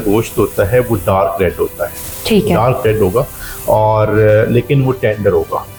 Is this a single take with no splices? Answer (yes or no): yes